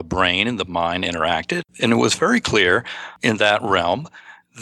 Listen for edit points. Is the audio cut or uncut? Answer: cut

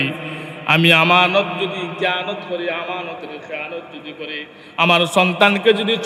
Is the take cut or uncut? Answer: uncut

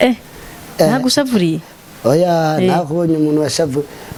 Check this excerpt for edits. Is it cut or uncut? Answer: uncut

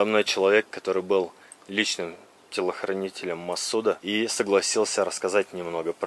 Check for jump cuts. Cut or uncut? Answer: cut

